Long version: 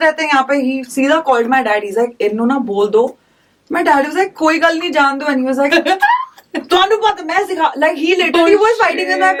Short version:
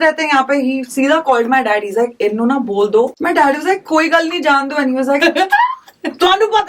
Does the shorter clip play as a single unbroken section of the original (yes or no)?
no